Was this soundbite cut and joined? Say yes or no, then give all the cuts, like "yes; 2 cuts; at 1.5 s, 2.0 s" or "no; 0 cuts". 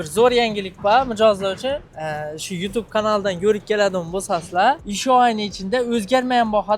yes; 2 cuts; at 1.9 s, 4.9 s